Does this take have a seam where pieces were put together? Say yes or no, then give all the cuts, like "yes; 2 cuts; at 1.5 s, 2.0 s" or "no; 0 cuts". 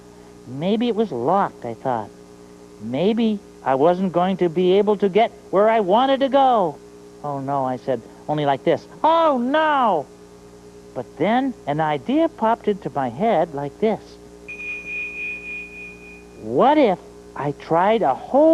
yes; 1 cut; at 9.8 s